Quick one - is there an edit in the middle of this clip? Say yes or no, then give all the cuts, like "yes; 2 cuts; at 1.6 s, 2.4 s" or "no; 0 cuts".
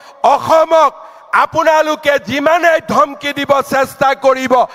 no; 0 cuts